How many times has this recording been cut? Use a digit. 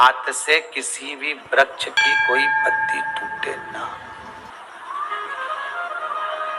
2